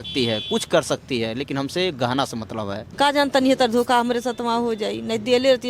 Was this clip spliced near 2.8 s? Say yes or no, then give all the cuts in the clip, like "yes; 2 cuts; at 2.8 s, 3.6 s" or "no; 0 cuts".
yes; 1 cut; at 2.8 s